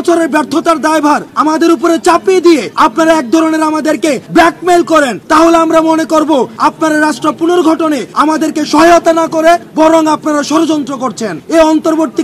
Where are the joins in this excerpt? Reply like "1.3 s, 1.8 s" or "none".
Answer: 1.3 s, 2.7 s, 4.2 s, 5.2 s, 6.5 s, 8.1 s, 9.7 s, 11.3 s